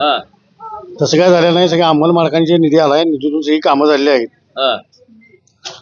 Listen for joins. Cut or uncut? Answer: uncut